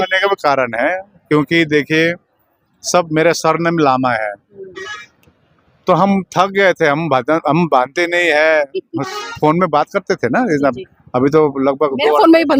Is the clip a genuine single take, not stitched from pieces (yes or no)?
yes